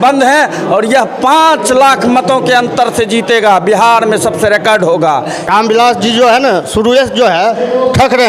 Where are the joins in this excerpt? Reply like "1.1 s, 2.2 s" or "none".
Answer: 5.5 s